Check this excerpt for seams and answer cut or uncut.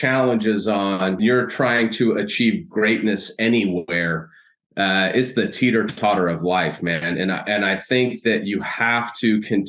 cut